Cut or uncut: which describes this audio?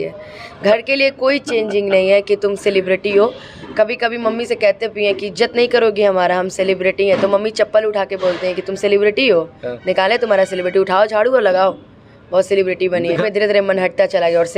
cut